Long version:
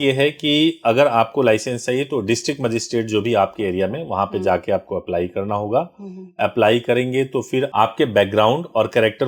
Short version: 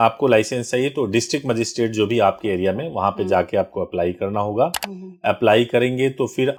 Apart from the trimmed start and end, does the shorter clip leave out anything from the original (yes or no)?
no